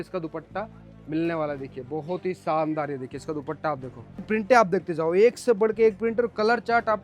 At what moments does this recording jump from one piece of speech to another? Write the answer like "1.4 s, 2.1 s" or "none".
4.3 s